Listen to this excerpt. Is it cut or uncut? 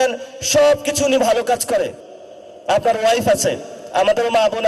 cut